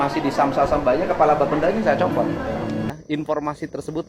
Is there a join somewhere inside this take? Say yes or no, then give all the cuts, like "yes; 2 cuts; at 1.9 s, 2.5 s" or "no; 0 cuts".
yes; 1 cut; at 2.9 s